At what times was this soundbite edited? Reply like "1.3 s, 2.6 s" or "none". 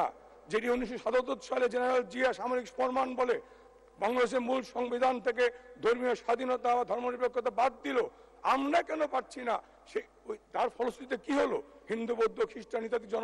none

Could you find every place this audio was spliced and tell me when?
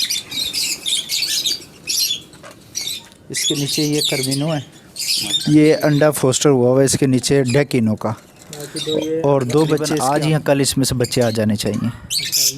9.9 s

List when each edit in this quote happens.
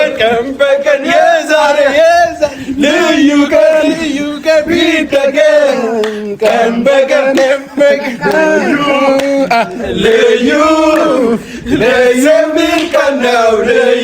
none

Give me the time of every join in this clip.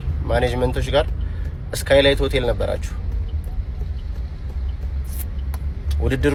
none

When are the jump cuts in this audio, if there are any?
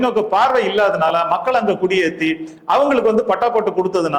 none

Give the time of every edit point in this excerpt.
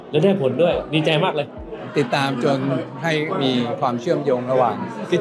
1.8 s

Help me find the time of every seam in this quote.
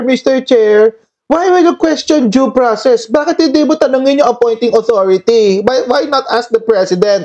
none

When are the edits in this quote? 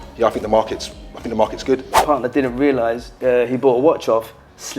2.0 s, 3.1 s

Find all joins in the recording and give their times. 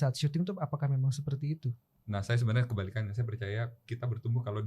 1.9 s

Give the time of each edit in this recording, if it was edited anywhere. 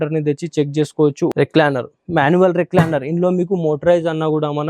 1.3 s

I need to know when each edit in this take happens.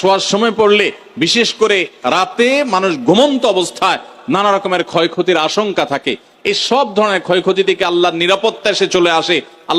none

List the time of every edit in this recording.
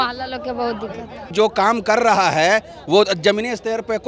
1.3 s

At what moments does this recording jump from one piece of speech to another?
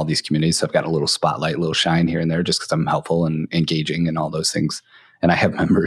none

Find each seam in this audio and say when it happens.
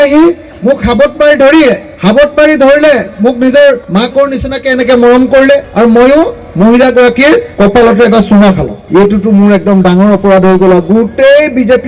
1.9 s, 3.8 s, 5.7 s, 7.5 s, 8.7 s

